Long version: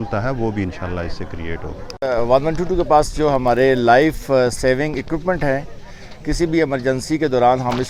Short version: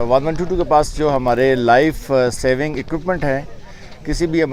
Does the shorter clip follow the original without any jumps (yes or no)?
yes